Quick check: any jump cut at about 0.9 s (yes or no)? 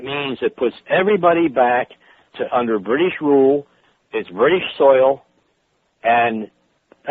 no